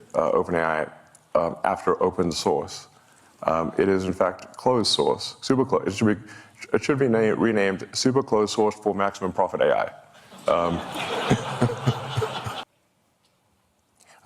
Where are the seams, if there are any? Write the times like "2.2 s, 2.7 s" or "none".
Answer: 12.6 s